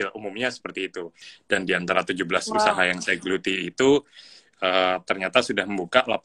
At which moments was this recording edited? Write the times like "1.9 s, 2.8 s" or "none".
1.2 s

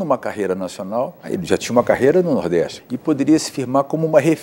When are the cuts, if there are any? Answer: 1.4 s, 2.8 s

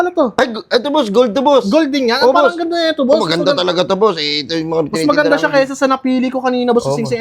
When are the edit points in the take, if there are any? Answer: none

